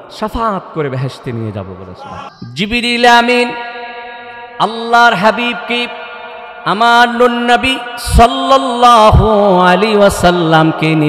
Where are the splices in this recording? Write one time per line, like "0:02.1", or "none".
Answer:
0:02.3